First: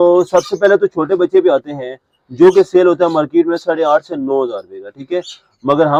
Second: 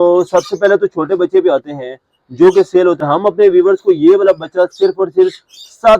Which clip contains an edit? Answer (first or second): second